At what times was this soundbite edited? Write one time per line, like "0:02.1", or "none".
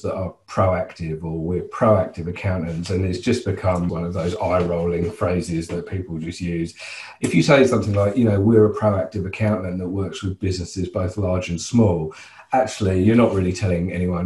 0:03.9
0:07.1